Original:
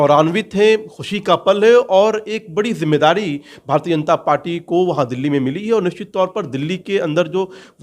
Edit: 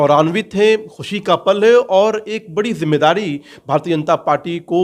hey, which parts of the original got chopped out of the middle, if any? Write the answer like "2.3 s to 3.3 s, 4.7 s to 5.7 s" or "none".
none